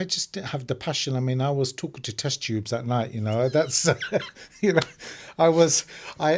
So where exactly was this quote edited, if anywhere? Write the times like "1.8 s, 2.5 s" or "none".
none